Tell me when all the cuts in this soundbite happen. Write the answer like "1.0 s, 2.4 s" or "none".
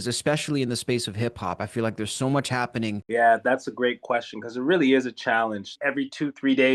3.0 s, 4.0 s, 5.8 s